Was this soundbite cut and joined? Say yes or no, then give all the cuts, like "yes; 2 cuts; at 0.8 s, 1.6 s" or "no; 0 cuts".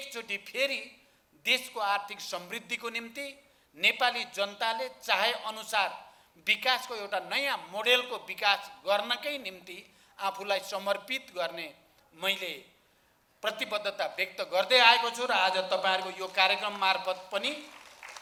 no; 0 cuts